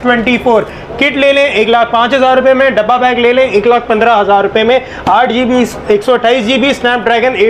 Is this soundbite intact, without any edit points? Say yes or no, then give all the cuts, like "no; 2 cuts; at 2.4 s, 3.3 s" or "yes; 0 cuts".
yes; 0 cuts